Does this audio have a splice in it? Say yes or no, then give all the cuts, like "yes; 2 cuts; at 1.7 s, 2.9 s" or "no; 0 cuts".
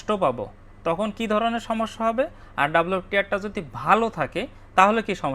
no; 0 cuts